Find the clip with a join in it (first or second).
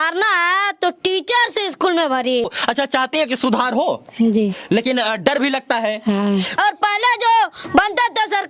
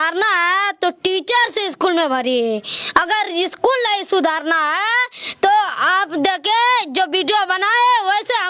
first